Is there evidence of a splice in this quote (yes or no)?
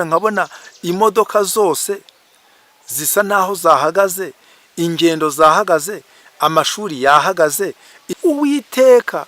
yes